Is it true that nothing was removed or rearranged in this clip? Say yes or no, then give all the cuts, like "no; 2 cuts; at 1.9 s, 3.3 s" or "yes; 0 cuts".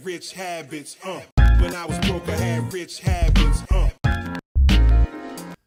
yes; 0 cuts